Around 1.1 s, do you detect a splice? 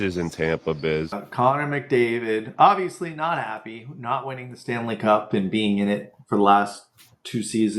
yes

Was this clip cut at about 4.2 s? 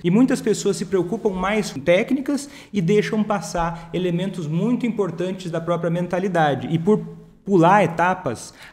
no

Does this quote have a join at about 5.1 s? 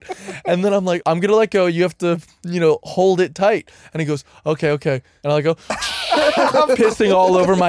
yes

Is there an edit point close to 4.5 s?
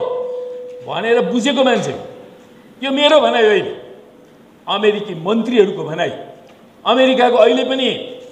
no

